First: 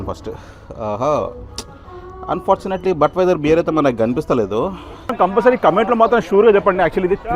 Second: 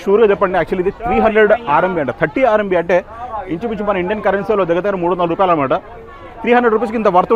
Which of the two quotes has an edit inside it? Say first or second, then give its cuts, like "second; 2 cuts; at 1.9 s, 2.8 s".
first; 1 cut; at 5.1 s